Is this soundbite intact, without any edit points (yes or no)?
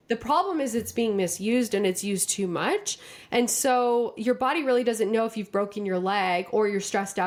yes